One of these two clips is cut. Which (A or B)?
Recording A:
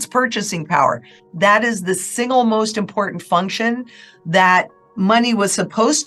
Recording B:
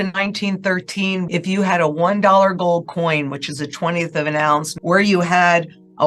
B